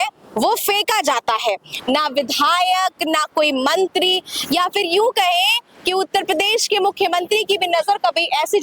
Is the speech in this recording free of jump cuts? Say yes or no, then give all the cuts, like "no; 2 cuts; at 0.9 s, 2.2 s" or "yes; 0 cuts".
no; 1 cut; at 1.7 s